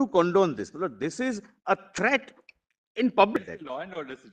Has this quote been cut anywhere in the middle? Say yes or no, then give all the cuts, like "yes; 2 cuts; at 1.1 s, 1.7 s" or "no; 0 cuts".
yes; 1 cut; at 3.4 s